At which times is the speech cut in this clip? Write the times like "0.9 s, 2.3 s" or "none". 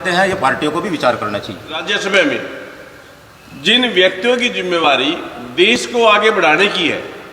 2.0 s